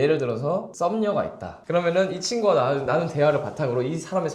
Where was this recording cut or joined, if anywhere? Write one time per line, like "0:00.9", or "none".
0:01.5